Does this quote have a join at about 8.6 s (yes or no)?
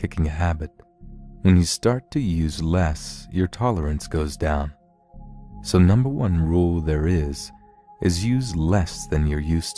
yes